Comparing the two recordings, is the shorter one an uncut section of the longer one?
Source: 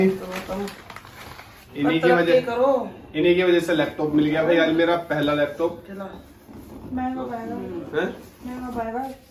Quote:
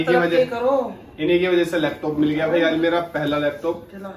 yes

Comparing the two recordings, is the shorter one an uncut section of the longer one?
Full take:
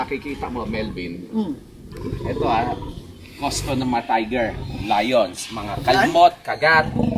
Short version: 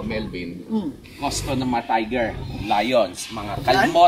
no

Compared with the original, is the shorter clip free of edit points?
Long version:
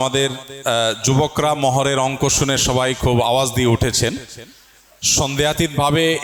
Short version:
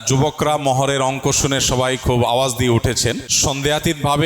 no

